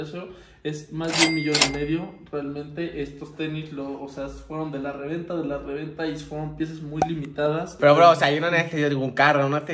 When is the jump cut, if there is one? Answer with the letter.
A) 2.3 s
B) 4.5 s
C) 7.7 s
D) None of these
C